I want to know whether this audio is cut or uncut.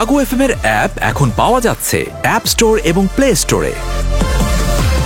uncut